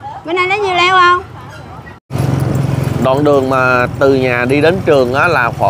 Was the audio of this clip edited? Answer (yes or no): yes